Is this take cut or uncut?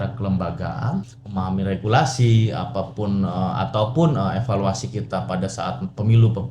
cut